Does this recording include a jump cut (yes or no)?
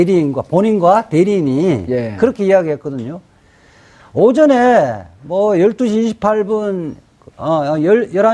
yes